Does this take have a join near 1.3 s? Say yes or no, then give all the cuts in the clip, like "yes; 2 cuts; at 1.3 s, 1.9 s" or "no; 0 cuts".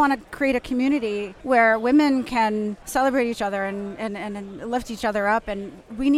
yes; 2 cuts; at 1.3 s, 2.8 s